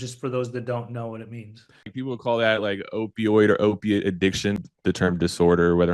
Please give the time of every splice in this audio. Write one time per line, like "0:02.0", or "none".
0:01.9
0:04.6

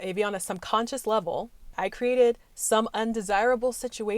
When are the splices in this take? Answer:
0:01.7

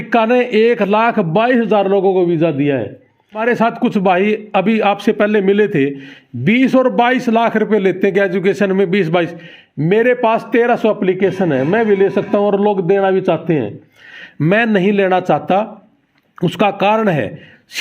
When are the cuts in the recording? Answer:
0:03.4

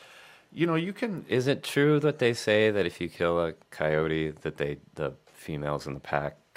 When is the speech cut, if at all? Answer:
none

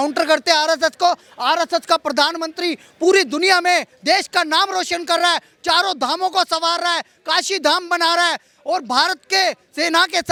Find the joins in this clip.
none

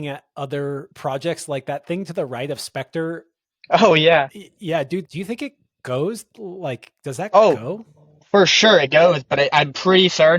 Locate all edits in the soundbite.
0:00.9
0:05.0

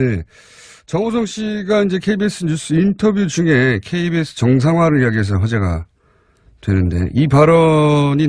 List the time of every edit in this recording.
0:05.0

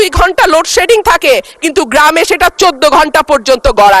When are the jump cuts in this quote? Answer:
none

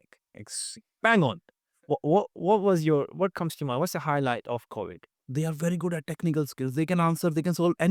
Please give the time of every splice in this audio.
0:05.2

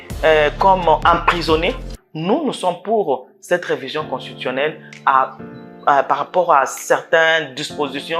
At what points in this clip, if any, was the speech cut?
0:01.9

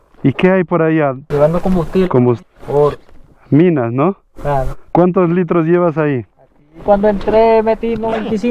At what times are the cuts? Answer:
0:01.2
0:02.4
0:04.8

